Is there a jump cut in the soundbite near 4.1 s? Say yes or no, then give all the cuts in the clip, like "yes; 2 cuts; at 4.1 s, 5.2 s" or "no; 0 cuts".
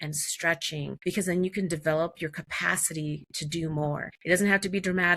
yes; 2 cuts; at 1.0 s, 4.1 s